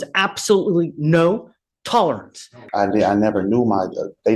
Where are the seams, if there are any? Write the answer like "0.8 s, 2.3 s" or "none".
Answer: 2.6 s